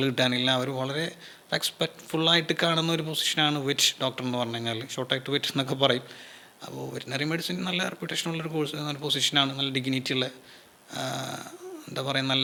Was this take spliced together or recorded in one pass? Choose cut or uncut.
uncut